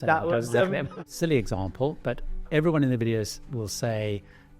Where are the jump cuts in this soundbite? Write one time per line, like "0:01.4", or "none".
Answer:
0:01.1